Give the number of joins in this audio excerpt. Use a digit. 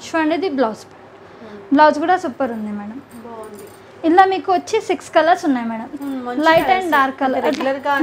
0